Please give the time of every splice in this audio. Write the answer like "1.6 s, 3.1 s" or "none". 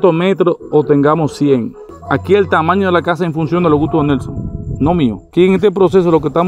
5.3 s